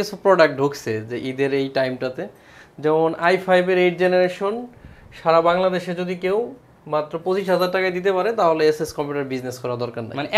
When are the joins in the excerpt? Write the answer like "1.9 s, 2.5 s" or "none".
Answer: none